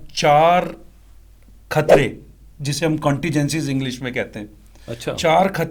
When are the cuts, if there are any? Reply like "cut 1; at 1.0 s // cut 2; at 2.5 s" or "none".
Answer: none